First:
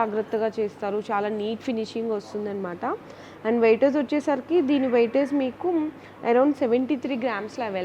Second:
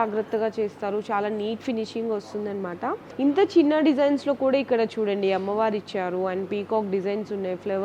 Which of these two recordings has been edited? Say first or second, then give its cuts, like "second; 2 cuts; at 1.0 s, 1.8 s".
second; 1 cut; at 3.1 s